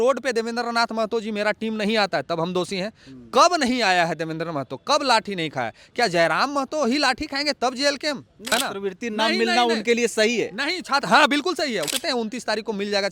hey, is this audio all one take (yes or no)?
no